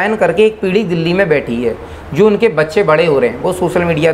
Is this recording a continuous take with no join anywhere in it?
yes; 0 cuts

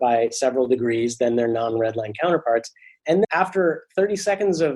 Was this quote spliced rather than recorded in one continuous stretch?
yes; 1 cut; at 3.3 s

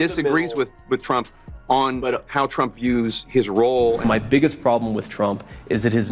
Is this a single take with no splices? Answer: no; 1 cut; at 4.0 s

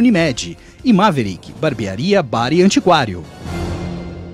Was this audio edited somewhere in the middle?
yes; 1 cut; at 3.4 s

